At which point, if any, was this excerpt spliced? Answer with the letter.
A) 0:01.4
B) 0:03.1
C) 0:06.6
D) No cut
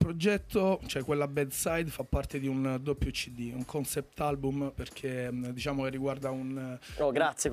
D